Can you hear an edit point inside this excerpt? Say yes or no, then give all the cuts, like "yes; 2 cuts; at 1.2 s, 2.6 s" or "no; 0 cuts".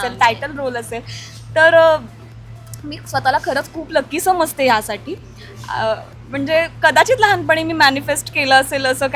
no; 0 cuts